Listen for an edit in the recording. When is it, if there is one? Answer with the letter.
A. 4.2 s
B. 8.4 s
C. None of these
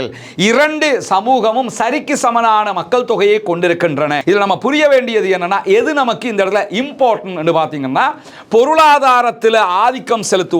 A